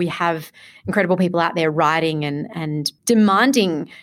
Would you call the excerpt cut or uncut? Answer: cut